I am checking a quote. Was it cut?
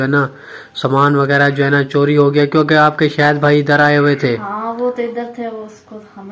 no; 0 cuts

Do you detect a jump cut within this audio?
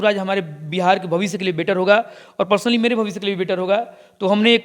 no; 0 cuts

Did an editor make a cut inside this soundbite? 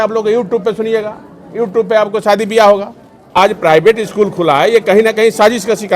yes; 1 cut; at 3.4 s

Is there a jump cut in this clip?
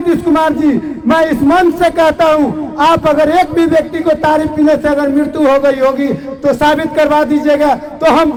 no; 0 cuts

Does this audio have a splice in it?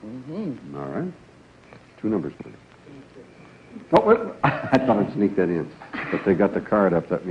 yes; 1 cut; at 6.3 s

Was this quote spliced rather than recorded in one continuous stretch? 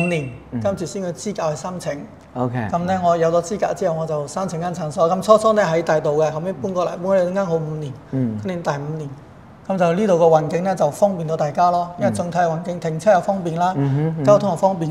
no; 0 cuts

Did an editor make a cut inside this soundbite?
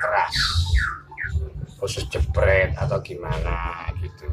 yes; 1 cut; at 1.2 s

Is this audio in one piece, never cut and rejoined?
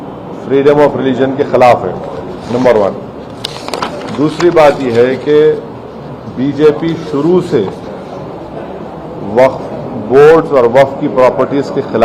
yes; 0 cuts

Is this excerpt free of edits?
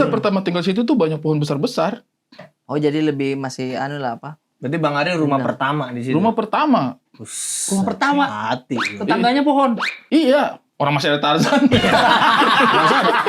yes; 0 cuts

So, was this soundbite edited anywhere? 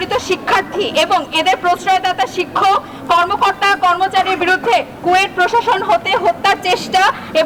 no; 0 cuts

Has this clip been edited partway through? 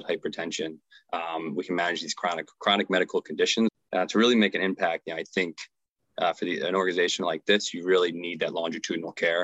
yes; 1 cut; at 3.8 s

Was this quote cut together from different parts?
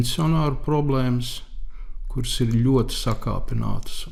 no; 0 cuts

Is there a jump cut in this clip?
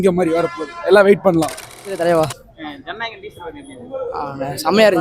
yes; 1 cut; at 1.8 s

